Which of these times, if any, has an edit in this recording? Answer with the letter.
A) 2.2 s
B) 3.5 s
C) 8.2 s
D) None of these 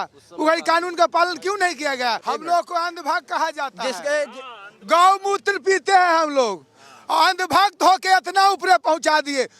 A